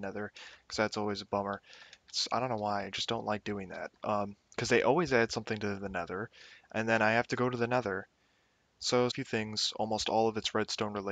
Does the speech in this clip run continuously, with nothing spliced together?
yes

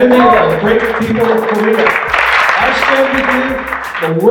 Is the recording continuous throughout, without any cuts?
no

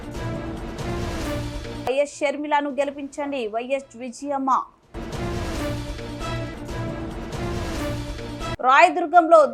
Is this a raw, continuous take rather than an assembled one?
yes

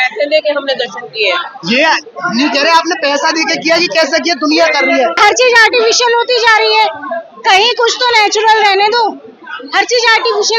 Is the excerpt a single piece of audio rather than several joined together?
no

